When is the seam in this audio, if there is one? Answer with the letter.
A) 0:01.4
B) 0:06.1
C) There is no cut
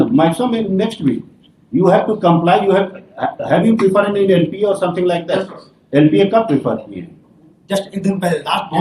C